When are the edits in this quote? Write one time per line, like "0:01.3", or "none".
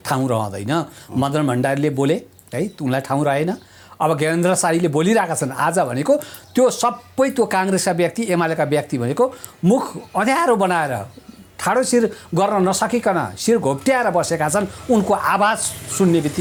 none

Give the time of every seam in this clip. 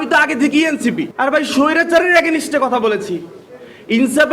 0:01.1

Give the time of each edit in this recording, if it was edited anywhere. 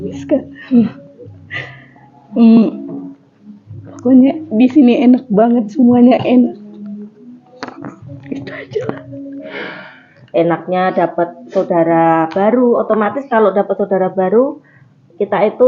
0:09.6

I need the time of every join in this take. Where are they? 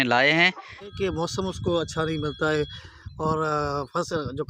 0:00.9

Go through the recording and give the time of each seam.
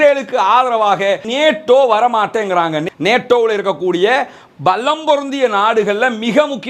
0:01.3
0:02.8

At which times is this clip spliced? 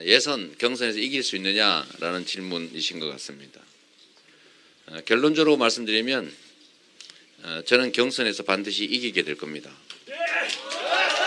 none

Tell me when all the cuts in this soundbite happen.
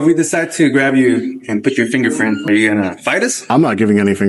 0:02.4
0:03.5

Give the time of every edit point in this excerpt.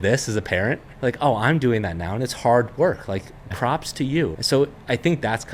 0:00.8
0:03.5
0:04.4

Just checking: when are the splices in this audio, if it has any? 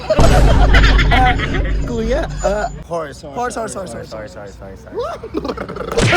0:02.8

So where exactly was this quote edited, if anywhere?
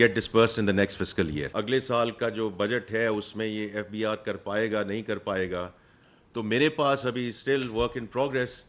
0:01.5

